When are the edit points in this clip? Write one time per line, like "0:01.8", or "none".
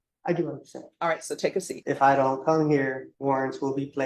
0:01.7
0:03.1

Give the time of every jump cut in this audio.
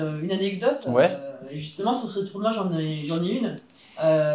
none

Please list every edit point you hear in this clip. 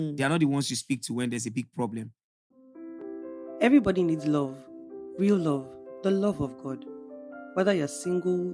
0:02.2

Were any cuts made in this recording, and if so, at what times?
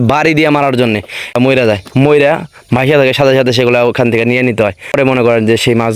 0:01.4
0:05.0

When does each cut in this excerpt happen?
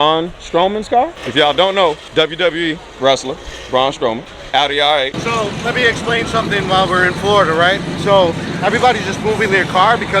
0:01.2
0:02.0
0:04.3
0:05.2

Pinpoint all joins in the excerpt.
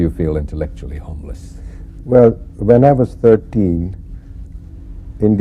0:03.1

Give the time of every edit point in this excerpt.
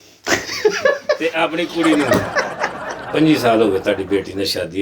0:03.0

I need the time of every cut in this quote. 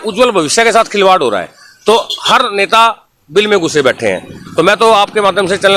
none

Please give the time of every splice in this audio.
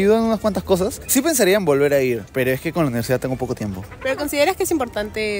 none

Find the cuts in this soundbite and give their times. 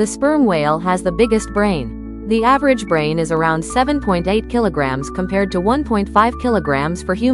none

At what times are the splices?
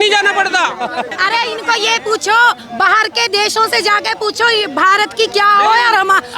0:01.1

